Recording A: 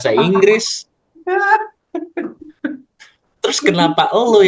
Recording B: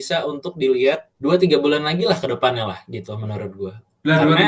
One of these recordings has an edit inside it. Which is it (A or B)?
B